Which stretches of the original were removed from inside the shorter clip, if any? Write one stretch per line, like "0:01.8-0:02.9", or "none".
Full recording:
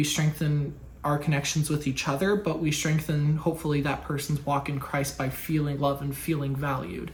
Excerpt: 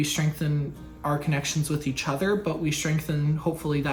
none